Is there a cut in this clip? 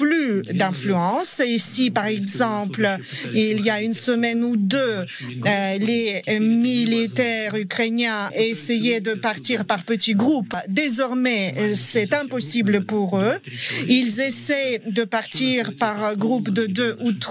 no; 0 cuts

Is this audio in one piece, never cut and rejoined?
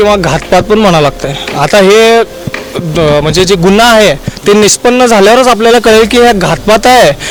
yes; 0 cuts

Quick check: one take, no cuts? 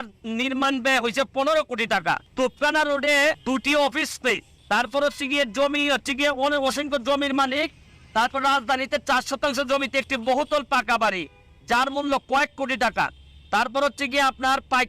no; 3 cuts; at 2.3 s, 3.4 s, 4.5 s

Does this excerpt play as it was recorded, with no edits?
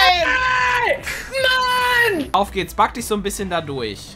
no; 1 cut; at 2.3 s

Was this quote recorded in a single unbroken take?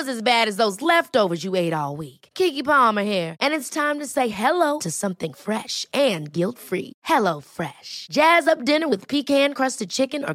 yes; 0 cuts

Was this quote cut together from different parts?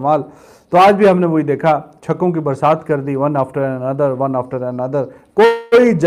no; 0 cuts

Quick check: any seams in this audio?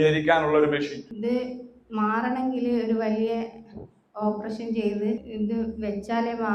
yes; 2 cuts; at 1.0 s, 5.3 s

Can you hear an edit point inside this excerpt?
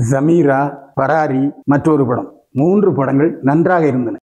no; 0 cuts

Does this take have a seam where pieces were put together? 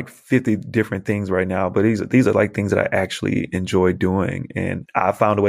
no; 0 cuts

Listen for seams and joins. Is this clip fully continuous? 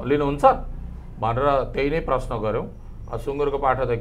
yes; 0 cuts

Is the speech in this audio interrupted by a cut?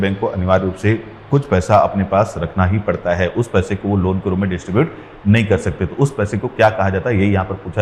no; 0 cuts

